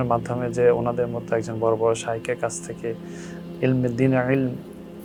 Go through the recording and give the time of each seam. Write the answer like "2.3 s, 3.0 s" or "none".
none